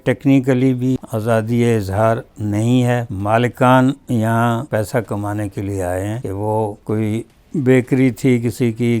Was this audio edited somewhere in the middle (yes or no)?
yes